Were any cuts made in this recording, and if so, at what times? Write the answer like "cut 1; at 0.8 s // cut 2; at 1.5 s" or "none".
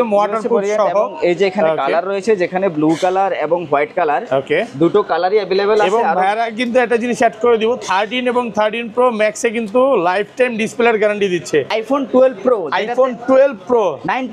cut 1; at 11.7 s